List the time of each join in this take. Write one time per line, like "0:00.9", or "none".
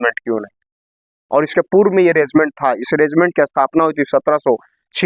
none